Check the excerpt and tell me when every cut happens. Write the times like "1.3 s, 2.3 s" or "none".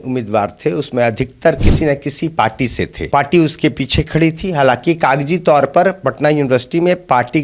3.1 s